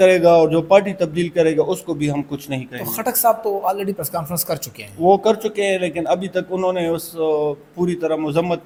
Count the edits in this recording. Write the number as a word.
zero